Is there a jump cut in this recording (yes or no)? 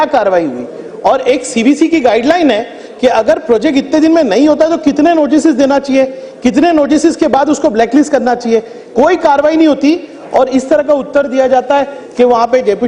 no